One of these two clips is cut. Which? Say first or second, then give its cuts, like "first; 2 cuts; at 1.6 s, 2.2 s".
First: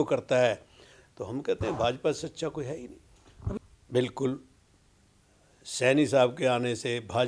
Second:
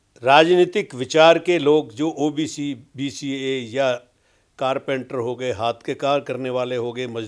first; 1 cut; at 3.5 s